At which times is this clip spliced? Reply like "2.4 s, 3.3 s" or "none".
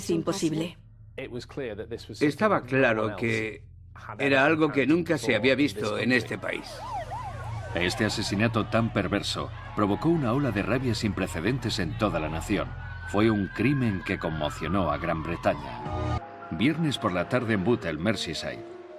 7.0 s